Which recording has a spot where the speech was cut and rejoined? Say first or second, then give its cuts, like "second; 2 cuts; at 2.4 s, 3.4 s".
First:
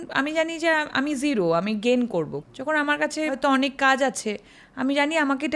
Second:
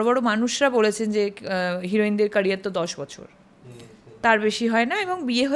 first; 2 cuts; at 2.5 s, 3.4 s